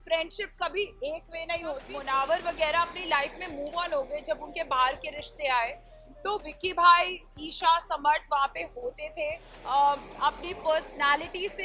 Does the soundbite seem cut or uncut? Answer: cut